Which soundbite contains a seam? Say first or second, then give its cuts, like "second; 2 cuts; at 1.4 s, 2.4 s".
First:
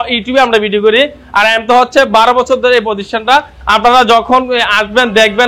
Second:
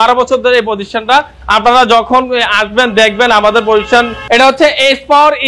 second; 1 cut; at 4.2 s